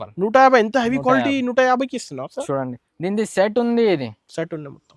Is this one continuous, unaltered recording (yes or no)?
yes